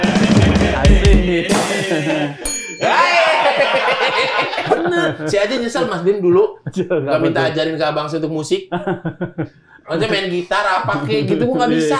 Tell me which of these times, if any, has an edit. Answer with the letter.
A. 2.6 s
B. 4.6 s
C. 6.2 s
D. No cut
B